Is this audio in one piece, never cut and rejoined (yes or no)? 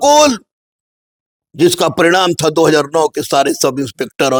yes